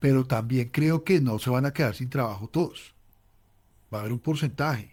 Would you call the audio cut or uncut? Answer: uncut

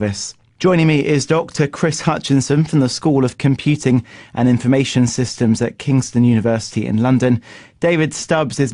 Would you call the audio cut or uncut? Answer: uncut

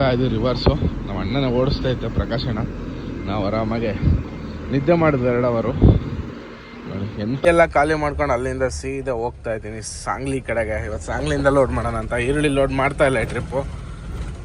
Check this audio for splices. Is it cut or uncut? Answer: cut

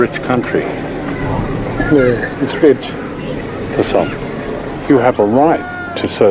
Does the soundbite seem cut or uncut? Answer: uncut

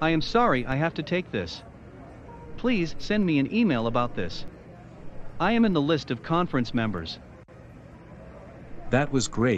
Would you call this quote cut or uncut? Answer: cut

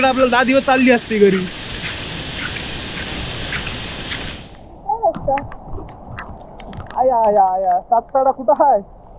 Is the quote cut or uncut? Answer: uncut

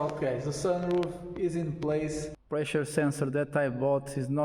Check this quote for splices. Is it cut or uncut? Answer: cut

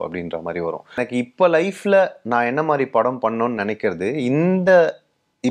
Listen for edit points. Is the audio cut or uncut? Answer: cut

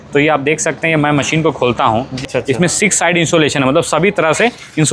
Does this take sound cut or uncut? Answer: cut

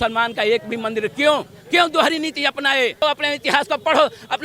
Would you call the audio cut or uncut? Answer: cut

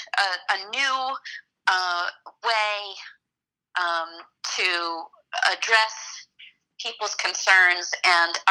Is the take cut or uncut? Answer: uncut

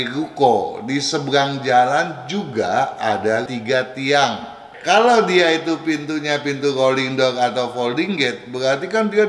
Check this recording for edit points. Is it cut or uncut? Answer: cut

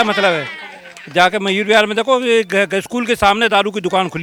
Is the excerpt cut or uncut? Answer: uncut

